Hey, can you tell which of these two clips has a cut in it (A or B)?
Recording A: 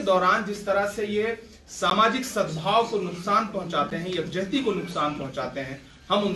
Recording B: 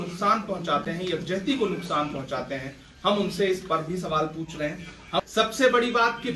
B